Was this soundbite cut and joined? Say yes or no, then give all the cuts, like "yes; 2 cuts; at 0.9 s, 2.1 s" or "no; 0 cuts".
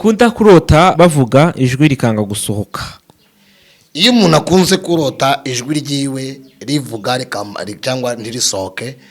yes; 1 cut; at 0.9 s